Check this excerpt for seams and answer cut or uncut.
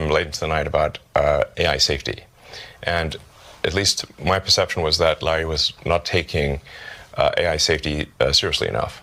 uncut